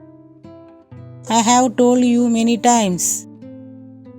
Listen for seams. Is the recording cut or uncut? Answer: cut